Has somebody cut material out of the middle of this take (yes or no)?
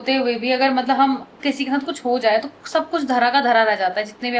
no